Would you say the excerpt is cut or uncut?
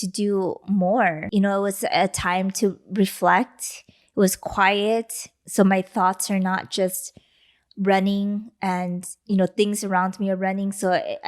cut